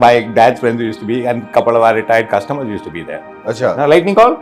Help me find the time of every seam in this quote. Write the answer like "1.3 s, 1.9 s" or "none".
none